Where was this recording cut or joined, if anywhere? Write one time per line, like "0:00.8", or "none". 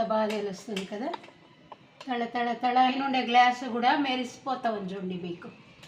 0:02.9

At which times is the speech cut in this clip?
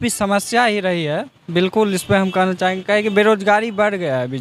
none

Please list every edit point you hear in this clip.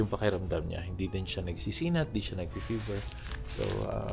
none

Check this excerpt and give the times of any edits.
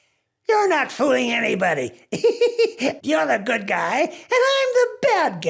0:03.0

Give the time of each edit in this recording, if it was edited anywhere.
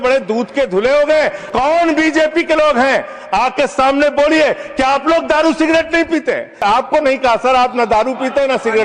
0:01.4
0:06.6

